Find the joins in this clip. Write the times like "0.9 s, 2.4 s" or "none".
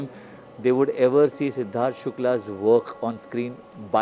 none